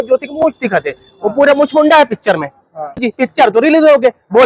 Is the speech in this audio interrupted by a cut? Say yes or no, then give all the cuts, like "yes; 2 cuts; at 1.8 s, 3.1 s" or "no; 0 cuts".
yes; 1 cut; at 3.0 s